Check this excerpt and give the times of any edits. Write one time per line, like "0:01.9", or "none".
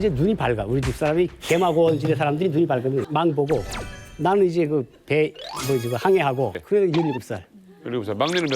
0:03.1
0:06.6